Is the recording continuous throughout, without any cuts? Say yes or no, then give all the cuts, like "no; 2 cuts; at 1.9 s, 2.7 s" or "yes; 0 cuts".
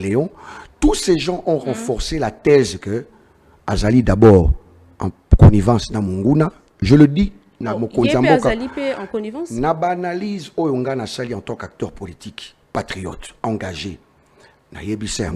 yes; 0 cuts